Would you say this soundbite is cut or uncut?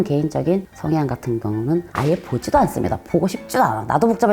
uncut